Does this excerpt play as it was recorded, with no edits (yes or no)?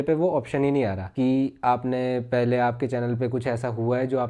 no